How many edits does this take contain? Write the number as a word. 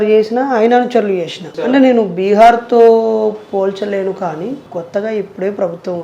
two